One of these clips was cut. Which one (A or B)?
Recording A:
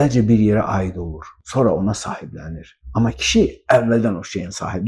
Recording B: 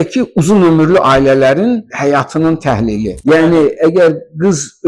B